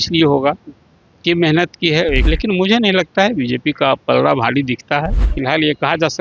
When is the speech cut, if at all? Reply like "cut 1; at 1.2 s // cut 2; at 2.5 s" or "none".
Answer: cut 1; at 2.2 s // cut 2; at 5.3 s